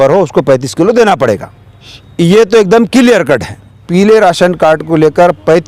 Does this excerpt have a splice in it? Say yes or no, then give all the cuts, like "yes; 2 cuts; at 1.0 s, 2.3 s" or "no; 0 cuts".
yes; 1 cut; at 3.8 s